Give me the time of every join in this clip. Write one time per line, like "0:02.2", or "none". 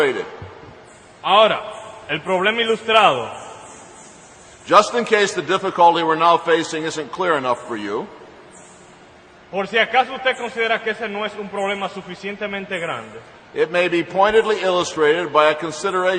0:10.8